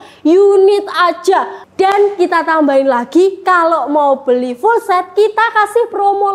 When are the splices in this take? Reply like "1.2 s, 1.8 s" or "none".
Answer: 1.6 s